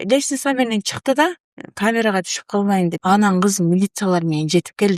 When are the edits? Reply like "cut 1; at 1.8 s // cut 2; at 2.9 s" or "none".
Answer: cut 1; at 3.0 s